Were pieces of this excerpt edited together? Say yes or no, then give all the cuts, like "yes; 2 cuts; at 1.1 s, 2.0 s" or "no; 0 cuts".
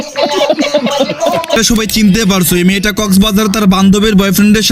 yes; 1 cut; at 1.6 s